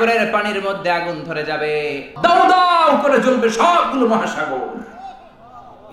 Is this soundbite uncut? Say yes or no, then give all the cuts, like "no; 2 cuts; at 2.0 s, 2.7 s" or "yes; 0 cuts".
no; 1 cut; at 2.1 s